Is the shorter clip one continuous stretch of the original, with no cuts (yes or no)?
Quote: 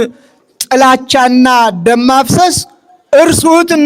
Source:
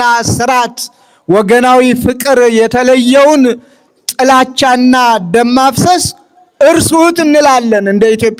yes